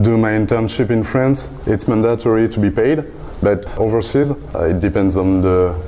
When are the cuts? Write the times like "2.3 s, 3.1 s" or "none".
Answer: 1.5 s, 4.4 s